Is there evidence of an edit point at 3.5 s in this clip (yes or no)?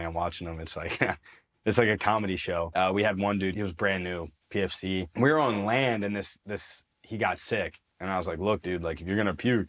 yes